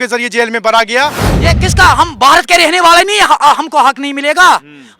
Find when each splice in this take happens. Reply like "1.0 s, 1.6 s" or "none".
1.3 s